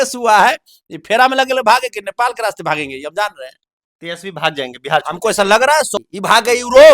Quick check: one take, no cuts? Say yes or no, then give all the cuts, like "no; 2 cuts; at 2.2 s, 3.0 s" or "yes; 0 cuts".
no; 1 cut; at 6.0 s